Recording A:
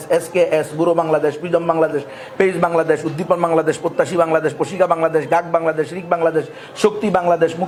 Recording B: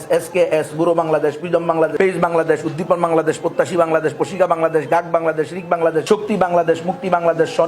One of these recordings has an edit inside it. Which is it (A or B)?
B